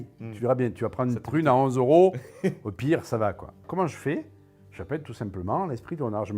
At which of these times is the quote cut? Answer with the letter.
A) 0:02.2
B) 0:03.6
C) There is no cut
B